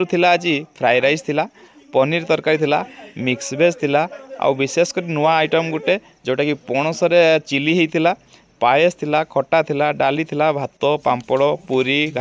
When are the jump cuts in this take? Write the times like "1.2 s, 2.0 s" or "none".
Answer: none